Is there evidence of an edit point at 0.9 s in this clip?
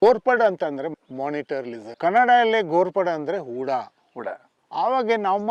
yes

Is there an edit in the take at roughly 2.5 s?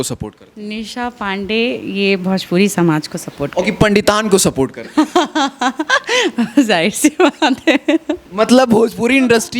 no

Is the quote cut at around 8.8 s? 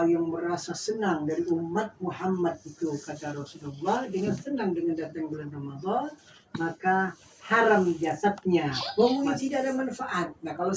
yes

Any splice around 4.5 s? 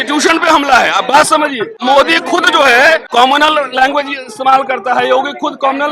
no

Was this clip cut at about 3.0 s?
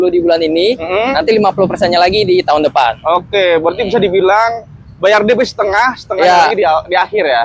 no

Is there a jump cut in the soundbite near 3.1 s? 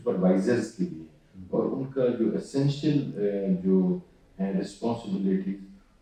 no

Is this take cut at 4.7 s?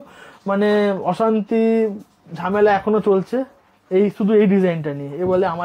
no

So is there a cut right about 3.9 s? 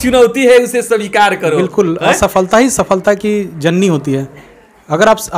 no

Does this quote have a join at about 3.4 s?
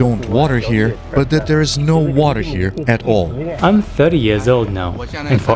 yes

